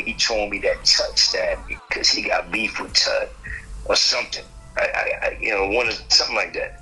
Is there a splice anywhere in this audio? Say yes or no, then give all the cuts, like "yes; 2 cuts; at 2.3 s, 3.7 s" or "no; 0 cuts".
yes; 1 cut; at 1.9 s